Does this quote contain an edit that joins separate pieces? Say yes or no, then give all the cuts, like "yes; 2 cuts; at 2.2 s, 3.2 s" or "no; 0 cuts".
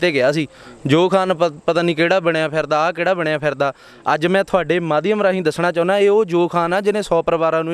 no; 0 cuts